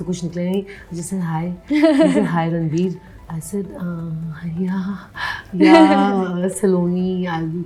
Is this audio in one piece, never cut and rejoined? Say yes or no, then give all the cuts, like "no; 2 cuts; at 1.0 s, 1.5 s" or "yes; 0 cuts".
yes; 0 cuts